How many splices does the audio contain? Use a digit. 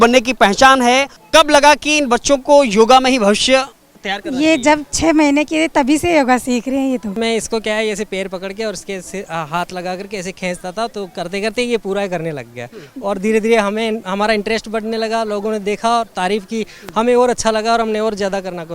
2